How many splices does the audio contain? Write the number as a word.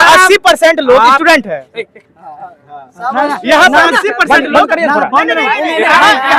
zero